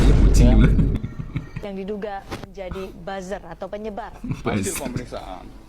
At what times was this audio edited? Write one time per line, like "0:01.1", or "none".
0:01.5